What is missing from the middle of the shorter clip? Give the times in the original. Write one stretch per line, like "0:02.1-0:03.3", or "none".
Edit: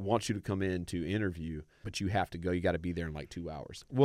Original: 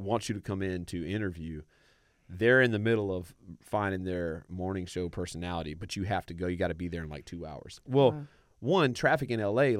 0:01.8-0:05.8